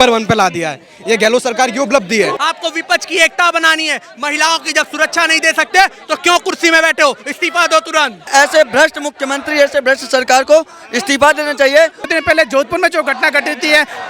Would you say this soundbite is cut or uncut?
cut